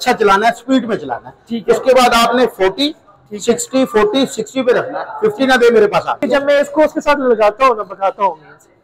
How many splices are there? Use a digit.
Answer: 1